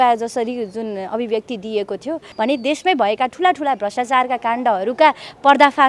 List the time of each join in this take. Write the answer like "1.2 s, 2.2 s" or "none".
2.3 s

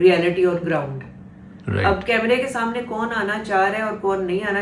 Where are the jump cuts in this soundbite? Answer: none

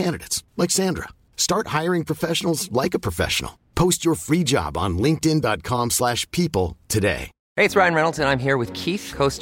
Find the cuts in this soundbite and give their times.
7.3 s

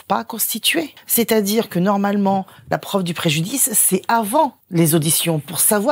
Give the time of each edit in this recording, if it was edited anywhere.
1.0 s, 4.6 s

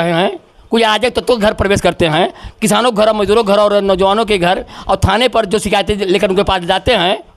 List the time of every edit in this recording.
none

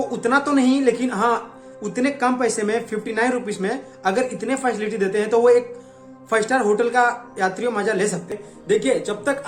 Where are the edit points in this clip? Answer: 8.5 s

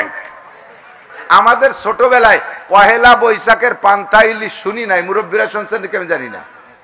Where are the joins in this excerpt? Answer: 1.2 s

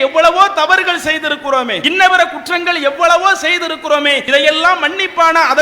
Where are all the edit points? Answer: 1.8 s, 4.2 s

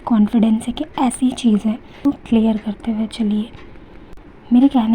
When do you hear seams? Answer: 1.9 s

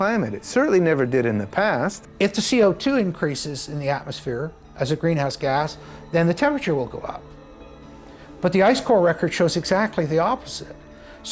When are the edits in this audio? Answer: 2.0 s

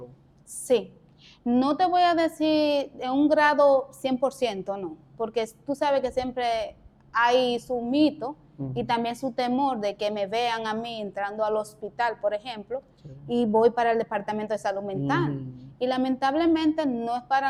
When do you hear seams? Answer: none

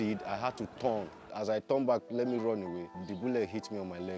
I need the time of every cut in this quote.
1.2 s

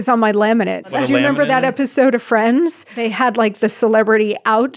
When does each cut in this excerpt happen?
0.9 s, 3.0 s

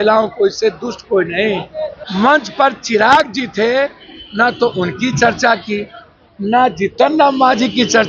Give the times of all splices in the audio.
2.0 s

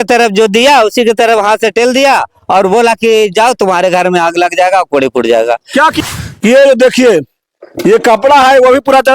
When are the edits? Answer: 6.0 s

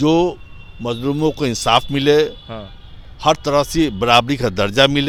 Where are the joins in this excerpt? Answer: none

